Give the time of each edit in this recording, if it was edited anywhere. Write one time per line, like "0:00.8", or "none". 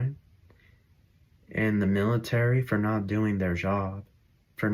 none